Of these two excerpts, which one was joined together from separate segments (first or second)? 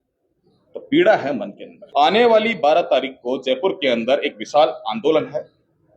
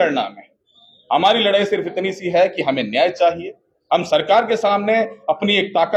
first